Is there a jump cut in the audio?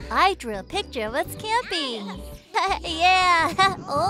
no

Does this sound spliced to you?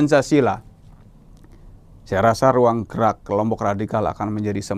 no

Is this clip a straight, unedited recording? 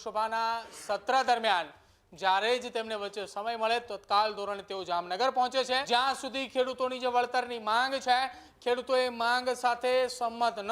no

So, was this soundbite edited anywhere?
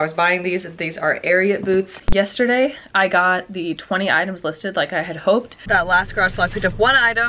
yes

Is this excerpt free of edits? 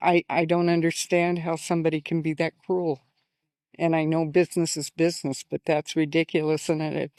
yes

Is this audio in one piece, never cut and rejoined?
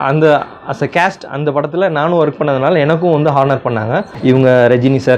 no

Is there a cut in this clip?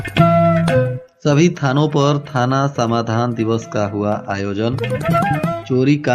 yes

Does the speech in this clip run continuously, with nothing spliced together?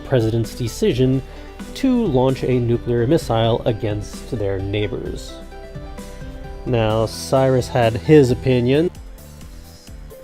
yes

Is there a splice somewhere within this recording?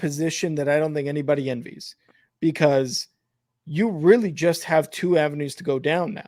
no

